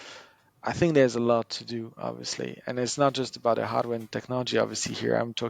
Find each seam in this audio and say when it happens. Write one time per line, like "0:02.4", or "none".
none